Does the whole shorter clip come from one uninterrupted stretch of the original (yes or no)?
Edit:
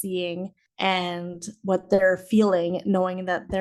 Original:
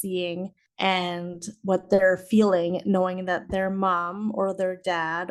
yes